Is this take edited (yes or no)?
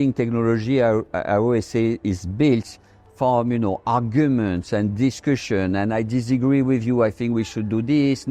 no